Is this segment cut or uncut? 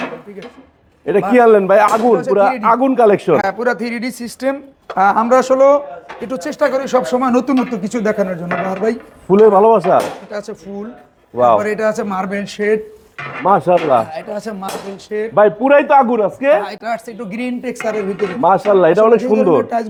uncut